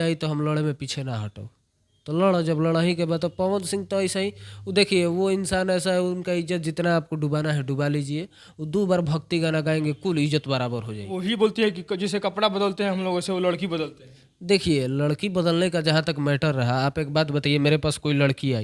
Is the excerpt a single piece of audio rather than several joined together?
no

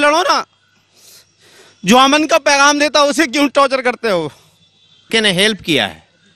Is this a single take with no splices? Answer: no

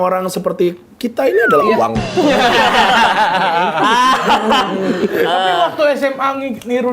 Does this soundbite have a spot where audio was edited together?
no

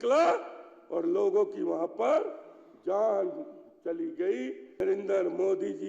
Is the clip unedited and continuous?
no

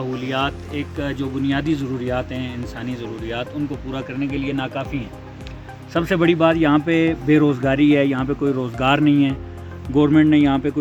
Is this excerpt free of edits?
yes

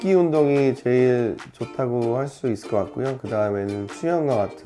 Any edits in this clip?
no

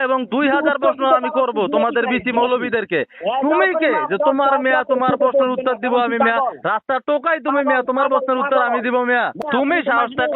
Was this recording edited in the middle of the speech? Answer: yes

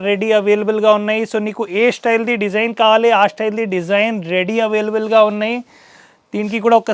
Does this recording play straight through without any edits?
yes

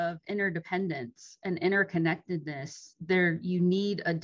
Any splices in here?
no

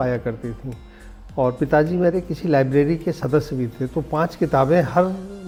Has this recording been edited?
no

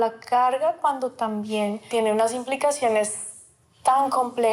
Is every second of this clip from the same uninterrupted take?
no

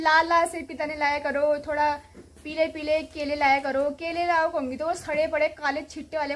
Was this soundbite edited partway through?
no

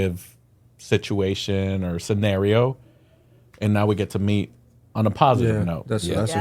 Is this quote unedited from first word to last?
yes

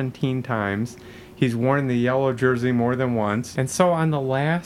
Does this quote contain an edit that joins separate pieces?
yes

